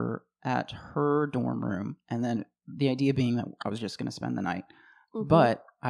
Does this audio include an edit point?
no; 0 cuts

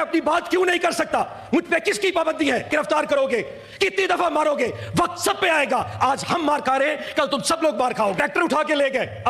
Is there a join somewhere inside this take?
yes; 2 cuts; at 2.7 s, 8.2 s

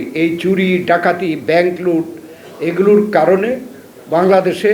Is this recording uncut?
yes; 0 cuts

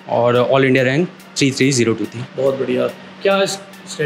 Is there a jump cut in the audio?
no; 0 cuts

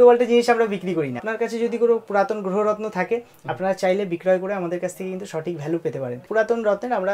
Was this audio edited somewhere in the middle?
yes; 2 cuts; at 1.3 s, 6.3 s

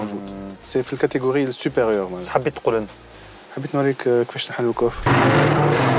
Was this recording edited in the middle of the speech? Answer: yes; 1 cut; at 5.0 s

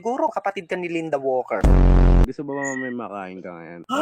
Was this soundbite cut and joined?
yes; 1 cut; at 2.2 s

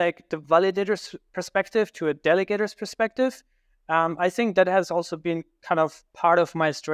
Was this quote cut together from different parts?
no; 0 cuts

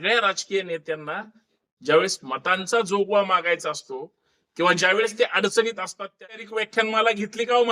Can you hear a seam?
yes; 1 cut; at 6.3 s

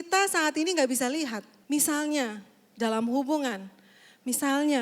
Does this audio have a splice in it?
yes; 1 cut; at 1.5 s

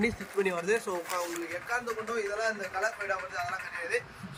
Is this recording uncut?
yes; 0 cuts

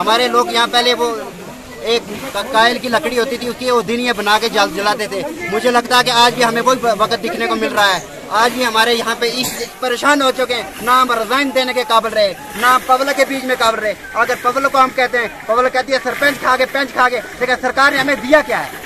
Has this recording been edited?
yes; 1 cut; at 9.7 s

